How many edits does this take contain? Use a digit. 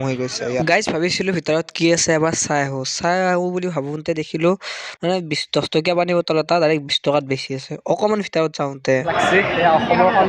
1